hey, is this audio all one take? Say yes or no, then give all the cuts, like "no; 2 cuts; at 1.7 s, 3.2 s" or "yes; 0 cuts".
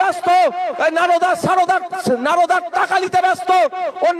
yes; 0 cuts